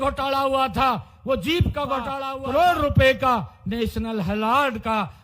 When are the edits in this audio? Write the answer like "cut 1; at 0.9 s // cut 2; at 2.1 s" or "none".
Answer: cut 1; at 2.2 s

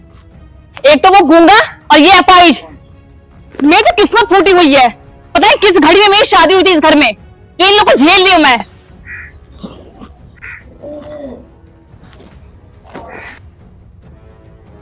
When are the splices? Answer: cut 1; at 13.4 s

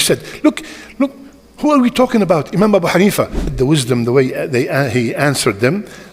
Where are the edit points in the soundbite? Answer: cut 1; at 3.5 s

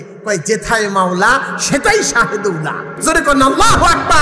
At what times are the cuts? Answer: cut 1; at 2.9 s

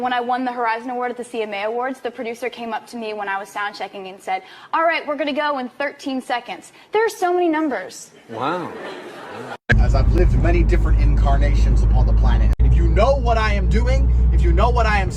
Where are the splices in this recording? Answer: cut 1; at 9.7 s // cut 2; at 12.4 s

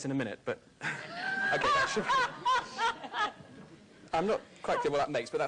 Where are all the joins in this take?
cut 1; at 3.4 s

